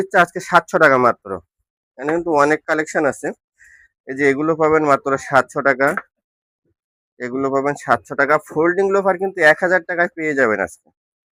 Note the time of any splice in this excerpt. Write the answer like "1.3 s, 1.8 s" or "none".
none